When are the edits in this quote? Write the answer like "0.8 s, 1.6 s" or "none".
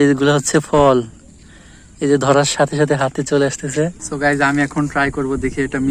4.0 s